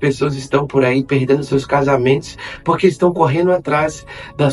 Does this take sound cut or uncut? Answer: uncut